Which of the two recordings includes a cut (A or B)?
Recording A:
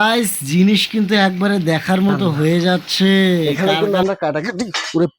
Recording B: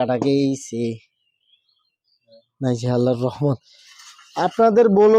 A